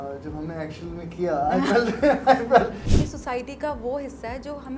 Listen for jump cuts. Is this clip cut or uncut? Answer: cut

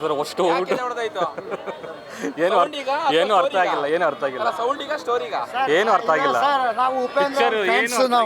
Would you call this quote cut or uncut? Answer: uncut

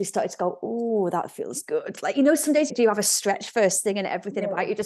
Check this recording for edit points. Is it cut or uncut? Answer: cut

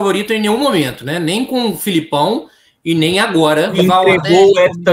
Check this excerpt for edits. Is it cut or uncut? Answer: cut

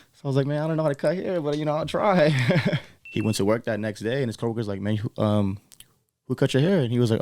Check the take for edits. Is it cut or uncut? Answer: cut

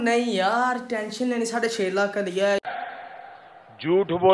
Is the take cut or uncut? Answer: uncut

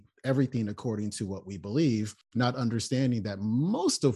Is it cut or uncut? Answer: uncut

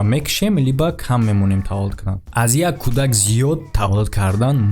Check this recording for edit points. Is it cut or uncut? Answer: cut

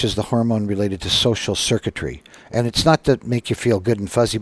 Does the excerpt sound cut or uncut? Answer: uncut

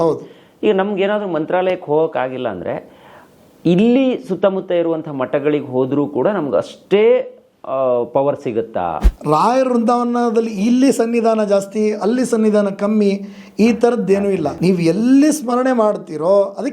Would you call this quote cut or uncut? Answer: cut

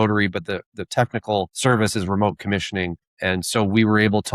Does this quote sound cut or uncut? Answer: cut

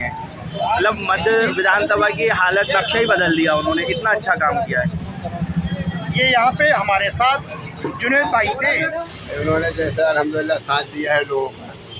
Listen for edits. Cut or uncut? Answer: cut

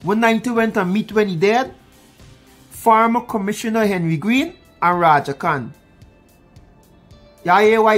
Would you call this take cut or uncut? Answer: uncut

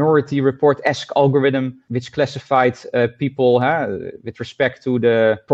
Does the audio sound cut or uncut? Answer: uncut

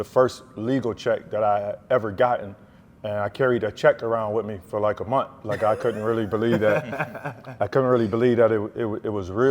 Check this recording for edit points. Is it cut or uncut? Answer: uncut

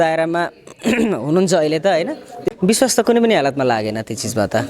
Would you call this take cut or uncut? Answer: cut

